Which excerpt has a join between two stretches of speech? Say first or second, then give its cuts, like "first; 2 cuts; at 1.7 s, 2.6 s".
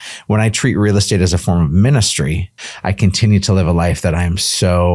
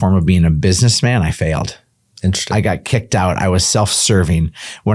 first; 1 cut; at 2.5 s